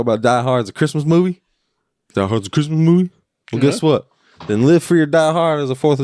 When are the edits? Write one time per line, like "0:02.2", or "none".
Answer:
none